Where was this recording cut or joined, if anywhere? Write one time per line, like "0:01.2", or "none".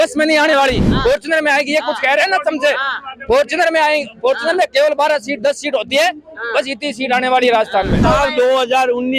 0:08.0